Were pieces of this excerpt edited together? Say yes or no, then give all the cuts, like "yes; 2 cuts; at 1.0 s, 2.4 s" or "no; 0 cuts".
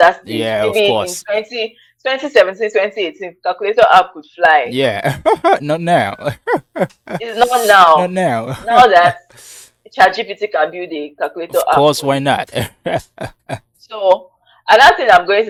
no; 0 cuts